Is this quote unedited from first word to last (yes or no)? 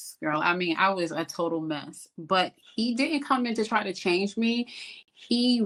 yes